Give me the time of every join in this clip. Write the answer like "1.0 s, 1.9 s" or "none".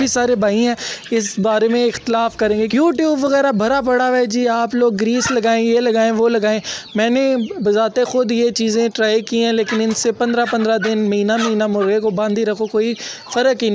2.7 s